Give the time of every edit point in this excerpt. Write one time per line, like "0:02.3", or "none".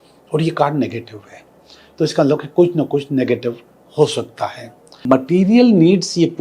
0:05.1

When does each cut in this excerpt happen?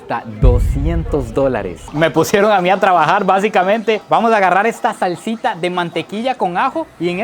0:01.9

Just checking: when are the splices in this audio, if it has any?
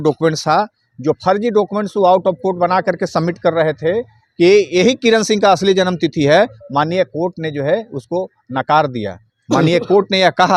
none

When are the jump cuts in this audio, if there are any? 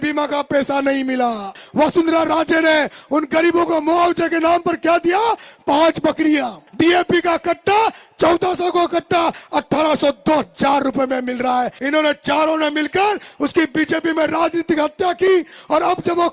0:01.6
0:06.6
0:11.8

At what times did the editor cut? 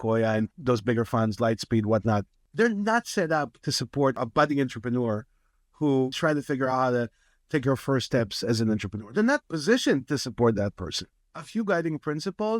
0:02.4
0:04.2
0:06.1
0:11.2

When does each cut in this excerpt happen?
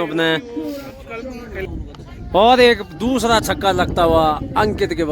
0:01.6

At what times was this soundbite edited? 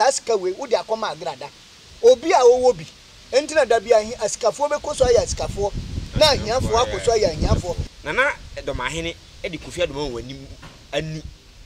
0:07.9

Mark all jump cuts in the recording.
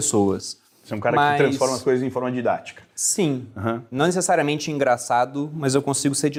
none

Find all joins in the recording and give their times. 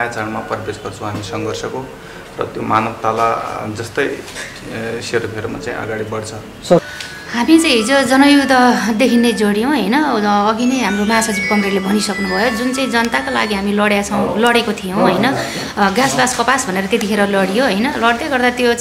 0:06.9

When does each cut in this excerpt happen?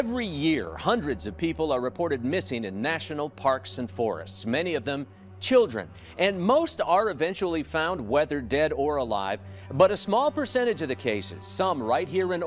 none

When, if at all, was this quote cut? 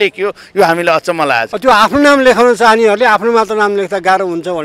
0:01.5

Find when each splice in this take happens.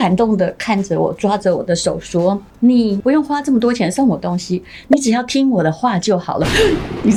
none

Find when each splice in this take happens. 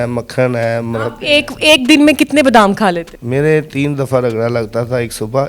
0:03.1

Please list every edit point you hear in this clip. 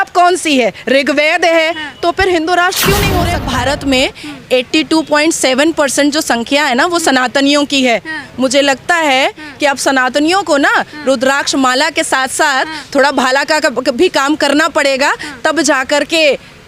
0:03.4

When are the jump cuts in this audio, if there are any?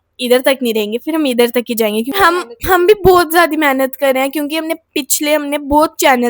0:02.1

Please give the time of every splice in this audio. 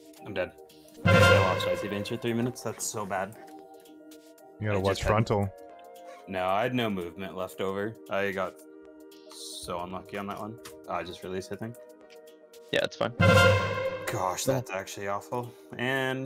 none

